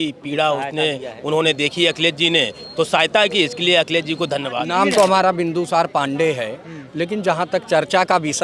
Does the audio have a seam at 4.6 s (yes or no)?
yes